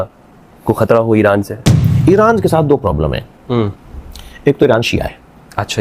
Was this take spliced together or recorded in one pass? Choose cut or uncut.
cut